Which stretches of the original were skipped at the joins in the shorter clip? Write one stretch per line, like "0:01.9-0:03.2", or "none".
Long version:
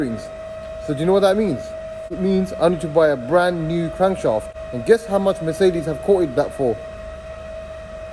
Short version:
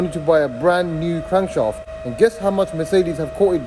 none